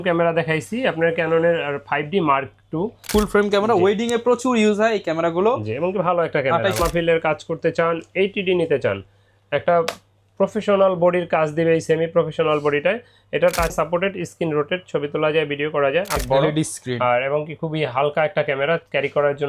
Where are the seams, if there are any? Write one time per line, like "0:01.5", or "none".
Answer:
0:03.1
0:06.8
0:13.7
0:16.2